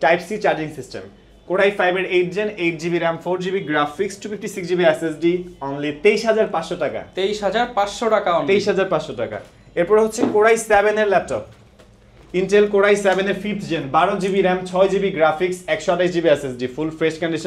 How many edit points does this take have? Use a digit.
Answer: 0